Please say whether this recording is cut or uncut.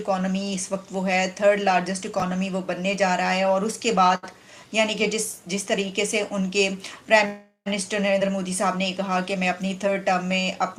uncut